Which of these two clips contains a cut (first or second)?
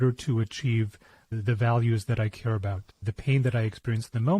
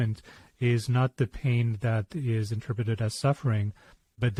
first